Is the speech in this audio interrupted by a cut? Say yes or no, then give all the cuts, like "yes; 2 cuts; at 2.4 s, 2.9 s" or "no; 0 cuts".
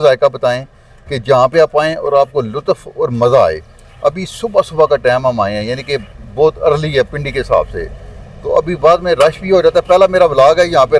no; 0 cuts